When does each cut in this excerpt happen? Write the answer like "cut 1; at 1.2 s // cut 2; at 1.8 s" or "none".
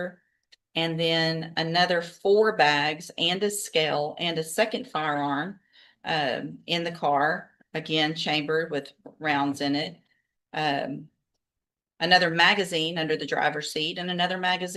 none